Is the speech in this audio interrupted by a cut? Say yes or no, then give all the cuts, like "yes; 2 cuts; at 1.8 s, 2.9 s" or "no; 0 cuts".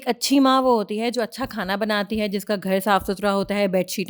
no; 0 cuts